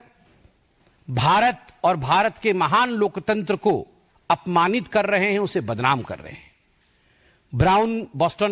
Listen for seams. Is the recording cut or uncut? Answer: cut